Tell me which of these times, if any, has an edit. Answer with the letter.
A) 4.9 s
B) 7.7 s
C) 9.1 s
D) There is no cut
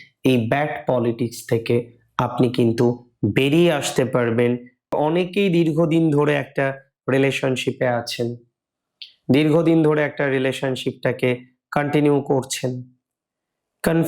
A